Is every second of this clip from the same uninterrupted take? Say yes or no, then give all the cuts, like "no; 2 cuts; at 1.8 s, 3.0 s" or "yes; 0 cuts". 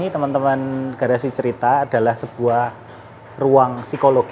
yes; 0 cuts